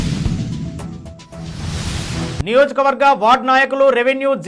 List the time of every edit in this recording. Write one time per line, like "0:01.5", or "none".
0:02.4

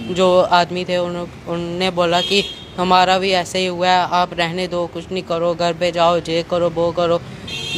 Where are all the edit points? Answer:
none

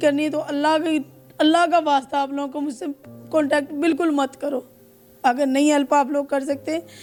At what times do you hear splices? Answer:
none

